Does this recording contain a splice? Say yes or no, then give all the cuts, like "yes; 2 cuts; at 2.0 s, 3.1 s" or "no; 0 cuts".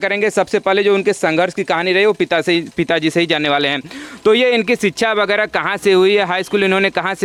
no; 0 cuts